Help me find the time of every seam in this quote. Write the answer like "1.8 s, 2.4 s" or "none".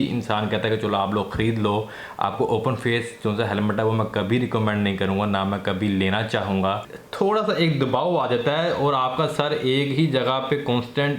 6.9 s